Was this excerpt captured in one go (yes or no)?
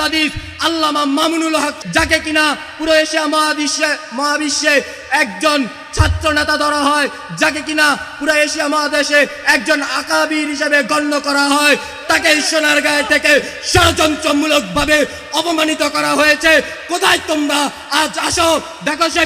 no